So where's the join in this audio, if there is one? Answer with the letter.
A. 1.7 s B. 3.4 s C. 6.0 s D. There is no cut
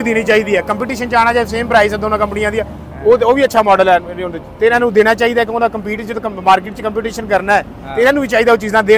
D